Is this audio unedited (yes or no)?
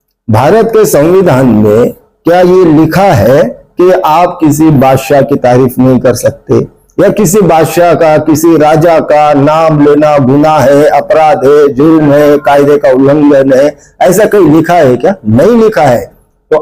yes